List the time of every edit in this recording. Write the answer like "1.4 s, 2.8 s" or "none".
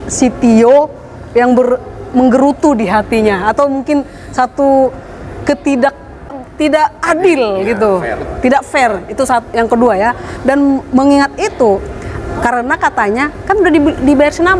6.4 s